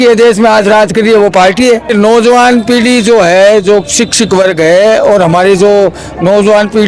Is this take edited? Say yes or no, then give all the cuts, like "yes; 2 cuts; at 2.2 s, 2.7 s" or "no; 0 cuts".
no; 0 cuts